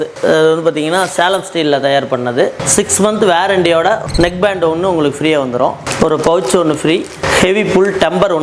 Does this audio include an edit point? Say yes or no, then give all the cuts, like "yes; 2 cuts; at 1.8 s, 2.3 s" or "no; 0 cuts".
no; 0 cuts